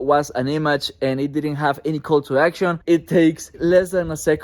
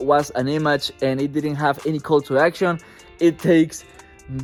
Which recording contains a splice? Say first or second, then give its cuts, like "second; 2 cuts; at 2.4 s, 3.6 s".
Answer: first; 2 cuts; at 2.8 s, 3.5 s